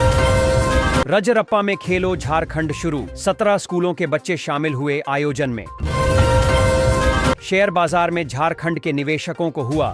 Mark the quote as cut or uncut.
cut